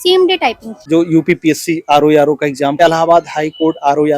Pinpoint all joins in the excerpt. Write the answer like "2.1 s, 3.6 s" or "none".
0.8 s, 2.8 s